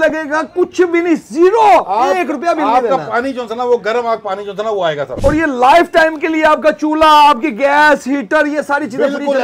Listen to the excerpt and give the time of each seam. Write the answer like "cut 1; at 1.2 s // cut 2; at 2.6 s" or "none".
cut 1; at 5.1 s